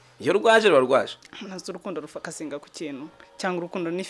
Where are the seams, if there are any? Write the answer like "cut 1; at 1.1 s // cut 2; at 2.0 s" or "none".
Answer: cut 1; at 1.3 s